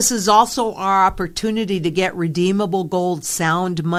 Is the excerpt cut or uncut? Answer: uncut